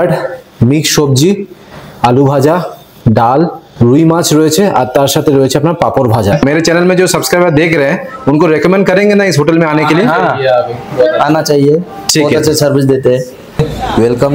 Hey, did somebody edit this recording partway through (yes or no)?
yes